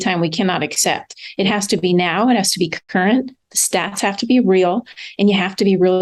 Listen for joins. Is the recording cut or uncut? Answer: uncut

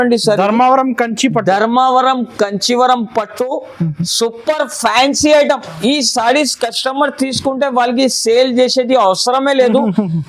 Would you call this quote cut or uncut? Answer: uncut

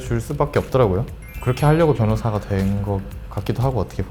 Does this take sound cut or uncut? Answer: uncut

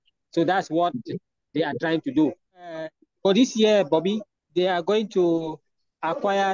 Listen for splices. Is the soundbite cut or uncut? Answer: cut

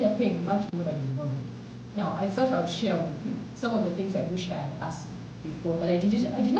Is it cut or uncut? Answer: uncut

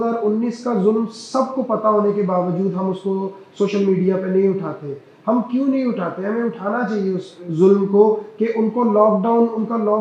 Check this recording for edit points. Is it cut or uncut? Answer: uncut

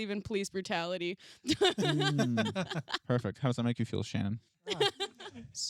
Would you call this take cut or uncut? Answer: cut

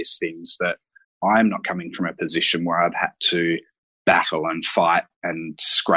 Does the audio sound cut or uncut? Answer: uncut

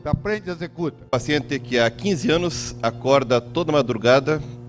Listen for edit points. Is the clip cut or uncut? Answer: cut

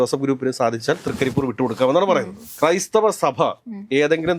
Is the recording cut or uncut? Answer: cut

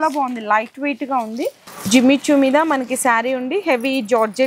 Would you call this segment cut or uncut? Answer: cut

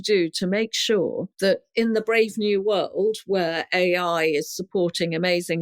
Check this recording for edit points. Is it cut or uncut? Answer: cut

